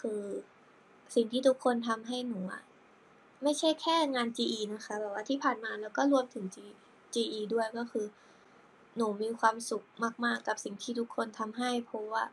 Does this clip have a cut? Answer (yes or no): no